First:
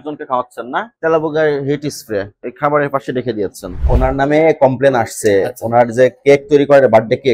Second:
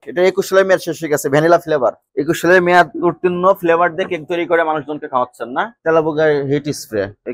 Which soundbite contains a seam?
first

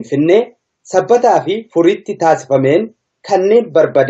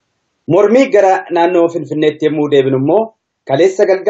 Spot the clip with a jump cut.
second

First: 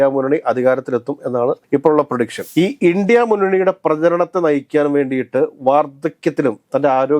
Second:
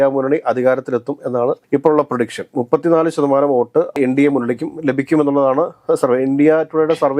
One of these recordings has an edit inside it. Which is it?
first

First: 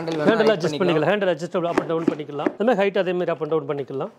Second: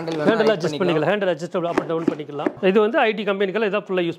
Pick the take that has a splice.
second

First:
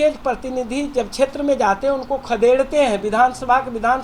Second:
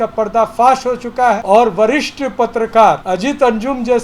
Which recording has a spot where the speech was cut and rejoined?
second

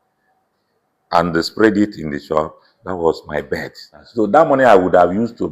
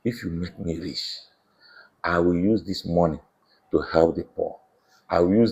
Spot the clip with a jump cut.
first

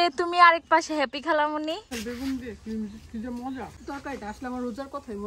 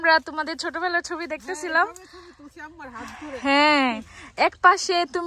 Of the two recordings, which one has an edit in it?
first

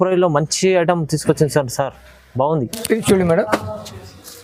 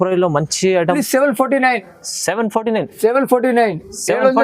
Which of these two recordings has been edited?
second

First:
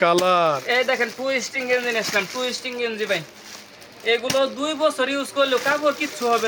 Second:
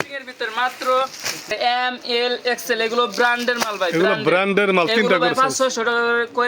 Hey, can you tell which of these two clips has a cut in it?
second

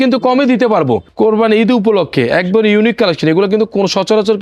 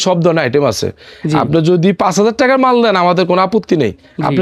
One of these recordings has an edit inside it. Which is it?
first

